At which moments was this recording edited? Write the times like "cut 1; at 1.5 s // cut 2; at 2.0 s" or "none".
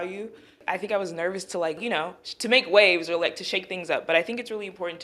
cut 1; at 1.8 s